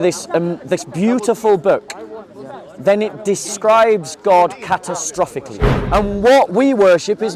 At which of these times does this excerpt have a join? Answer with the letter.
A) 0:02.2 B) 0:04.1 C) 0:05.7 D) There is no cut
C